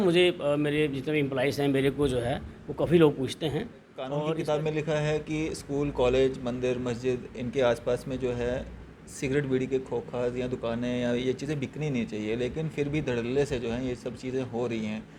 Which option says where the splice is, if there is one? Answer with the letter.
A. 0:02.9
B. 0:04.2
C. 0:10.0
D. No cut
B